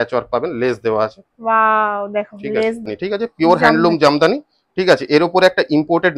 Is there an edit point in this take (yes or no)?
yes